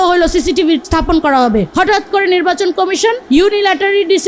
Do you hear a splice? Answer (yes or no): yes